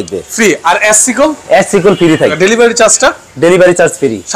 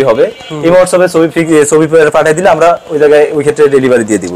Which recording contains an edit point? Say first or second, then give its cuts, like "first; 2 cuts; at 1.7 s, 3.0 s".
first; 1 cut; at 2.4 s